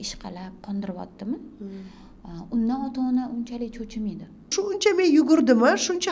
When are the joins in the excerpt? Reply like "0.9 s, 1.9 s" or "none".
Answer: 4.5 s